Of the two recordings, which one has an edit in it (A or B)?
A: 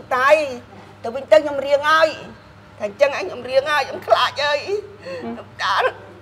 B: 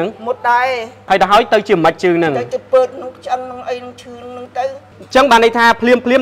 B